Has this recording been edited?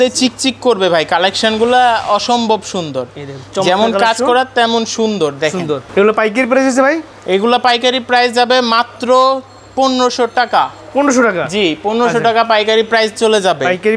no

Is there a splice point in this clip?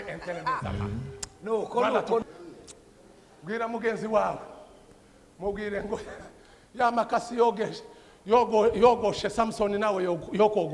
yes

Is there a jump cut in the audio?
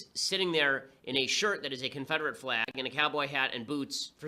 no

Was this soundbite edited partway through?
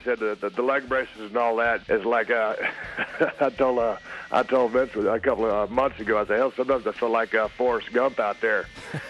yes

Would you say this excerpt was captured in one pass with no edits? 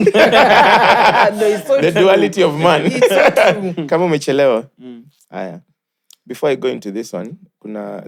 yes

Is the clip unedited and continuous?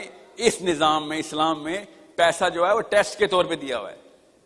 yes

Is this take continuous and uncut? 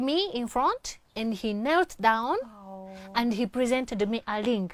yes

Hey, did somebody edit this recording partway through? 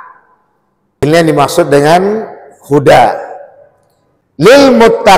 yes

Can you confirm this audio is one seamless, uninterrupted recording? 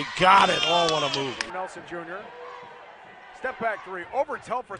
no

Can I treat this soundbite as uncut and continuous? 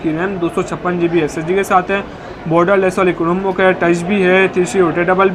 yes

